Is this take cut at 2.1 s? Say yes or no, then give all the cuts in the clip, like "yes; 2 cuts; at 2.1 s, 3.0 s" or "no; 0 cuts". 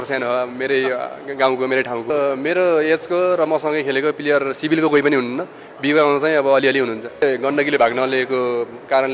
yes; 2 cuts; at 2.1 s, 7.2 s